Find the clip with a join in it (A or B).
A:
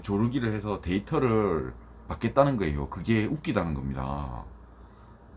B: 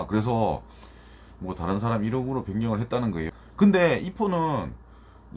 B